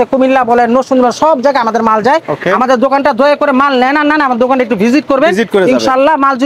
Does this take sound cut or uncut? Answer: uncut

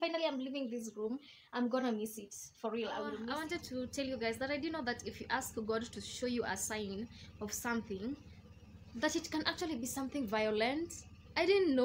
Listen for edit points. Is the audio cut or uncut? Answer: cut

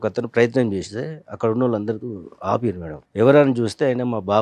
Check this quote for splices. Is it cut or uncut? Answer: cut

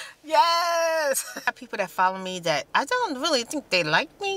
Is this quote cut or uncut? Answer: cut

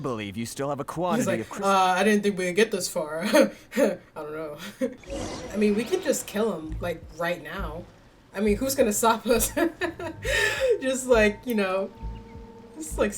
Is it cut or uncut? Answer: cut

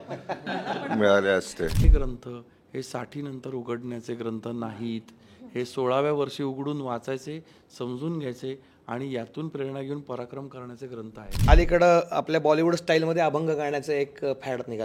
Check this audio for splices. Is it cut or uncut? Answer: cut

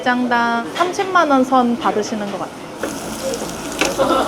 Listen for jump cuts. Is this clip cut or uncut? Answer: uncut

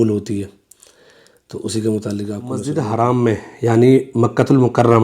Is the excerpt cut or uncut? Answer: cut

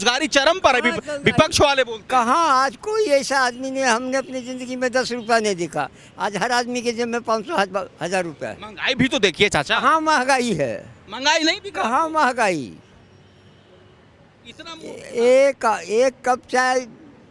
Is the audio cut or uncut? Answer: uncut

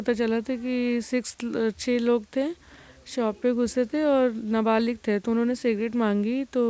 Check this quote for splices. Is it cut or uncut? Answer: uncut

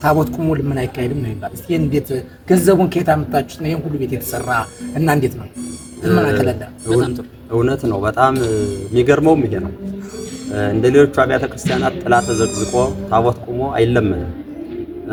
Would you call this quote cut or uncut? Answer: uncut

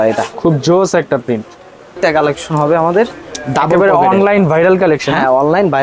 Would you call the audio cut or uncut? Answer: cut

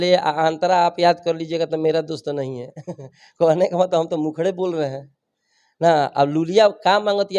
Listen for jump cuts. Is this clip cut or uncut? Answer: uncut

